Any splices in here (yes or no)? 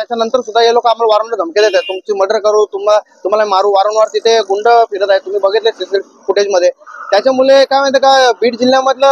no